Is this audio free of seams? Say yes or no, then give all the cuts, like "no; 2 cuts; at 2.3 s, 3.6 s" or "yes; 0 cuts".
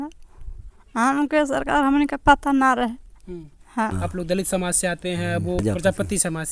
no; 2 cuts; at 3.9 s, 5.6 s